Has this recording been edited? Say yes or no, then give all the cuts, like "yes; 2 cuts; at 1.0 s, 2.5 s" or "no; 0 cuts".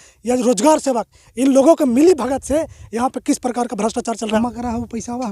yes; 1 cut; at 4.4 s